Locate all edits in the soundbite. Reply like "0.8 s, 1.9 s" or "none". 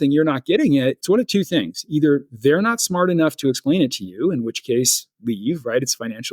1.0 s